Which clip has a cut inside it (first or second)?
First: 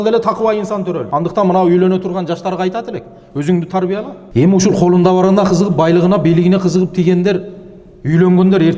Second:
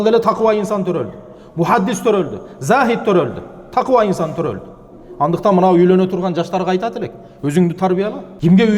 first